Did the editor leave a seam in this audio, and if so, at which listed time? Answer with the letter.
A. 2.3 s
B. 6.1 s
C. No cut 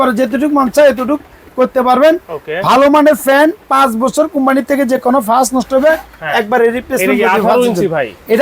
C